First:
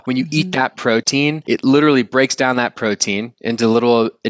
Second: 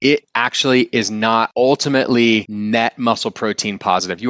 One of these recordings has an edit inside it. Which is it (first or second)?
second